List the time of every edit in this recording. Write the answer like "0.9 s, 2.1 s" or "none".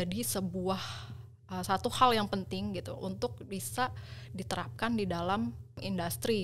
none